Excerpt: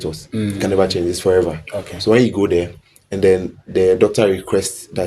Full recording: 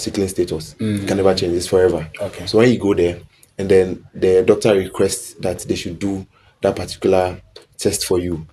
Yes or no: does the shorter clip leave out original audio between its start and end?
no